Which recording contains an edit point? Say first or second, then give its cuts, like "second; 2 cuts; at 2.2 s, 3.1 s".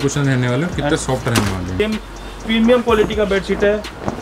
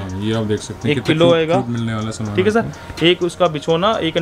first; 1 cut; at 1.8 s